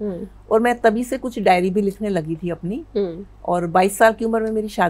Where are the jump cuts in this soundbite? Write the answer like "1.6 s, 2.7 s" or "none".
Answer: none